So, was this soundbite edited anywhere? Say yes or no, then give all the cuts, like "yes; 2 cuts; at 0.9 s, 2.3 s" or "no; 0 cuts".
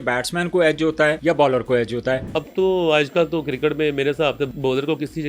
yes; 3 cuts; at 1.2 s, 2.3 s, 4.5 s